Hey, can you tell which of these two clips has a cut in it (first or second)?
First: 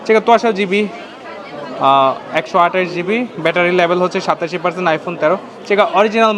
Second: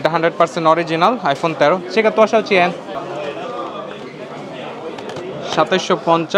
second